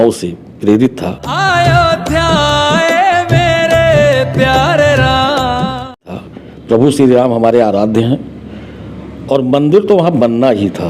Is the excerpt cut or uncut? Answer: cut